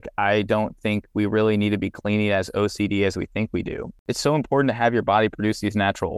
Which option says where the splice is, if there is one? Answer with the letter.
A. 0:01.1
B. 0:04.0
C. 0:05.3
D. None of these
B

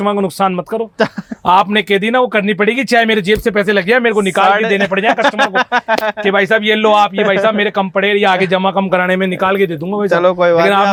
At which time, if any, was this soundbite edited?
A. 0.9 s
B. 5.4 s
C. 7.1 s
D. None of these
D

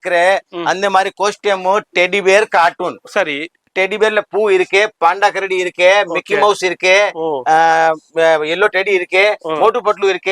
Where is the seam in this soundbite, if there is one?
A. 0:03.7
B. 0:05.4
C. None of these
A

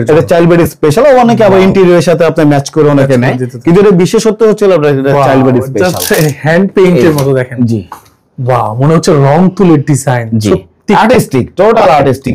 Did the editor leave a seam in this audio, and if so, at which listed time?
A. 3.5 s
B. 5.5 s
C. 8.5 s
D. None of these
D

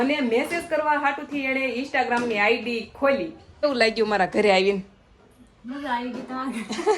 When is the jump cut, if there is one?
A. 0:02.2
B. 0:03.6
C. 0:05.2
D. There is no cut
B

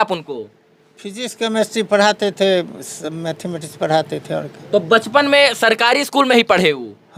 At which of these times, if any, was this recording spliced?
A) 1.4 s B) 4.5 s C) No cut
C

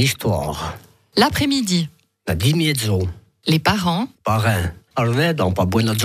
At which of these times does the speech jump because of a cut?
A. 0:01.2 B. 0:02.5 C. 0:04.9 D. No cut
C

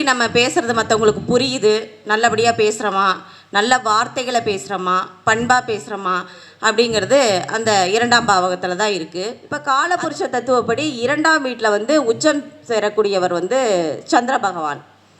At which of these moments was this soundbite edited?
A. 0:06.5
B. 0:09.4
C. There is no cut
B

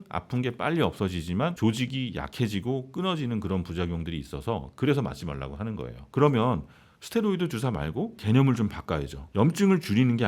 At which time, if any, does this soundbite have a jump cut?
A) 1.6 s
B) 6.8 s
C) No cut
A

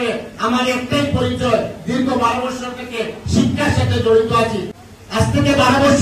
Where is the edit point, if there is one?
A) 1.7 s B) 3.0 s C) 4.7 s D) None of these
C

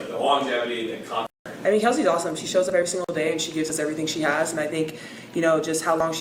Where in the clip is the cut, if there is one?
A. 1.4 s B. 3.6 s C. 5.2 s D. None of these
A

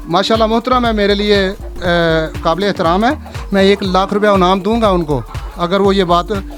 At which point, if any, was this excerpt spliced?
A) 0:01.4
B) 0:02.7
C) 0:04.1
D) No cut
D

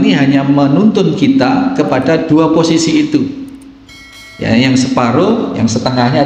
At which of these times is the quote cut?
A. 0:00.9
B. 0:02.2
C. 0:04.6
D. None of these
B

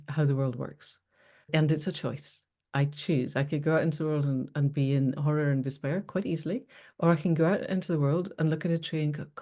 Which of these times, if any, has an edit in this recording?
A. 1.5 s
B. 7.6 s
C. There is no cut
A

